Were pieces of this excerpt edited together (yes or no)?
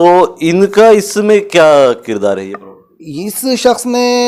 no